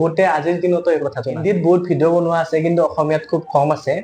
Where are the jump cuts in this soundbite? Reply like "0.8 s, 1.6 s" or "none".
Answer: 1.3 s